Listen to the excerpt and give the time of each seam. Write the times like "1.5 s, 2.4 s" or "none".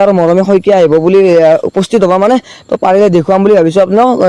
none